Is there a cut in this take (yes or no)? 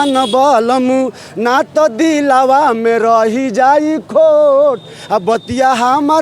no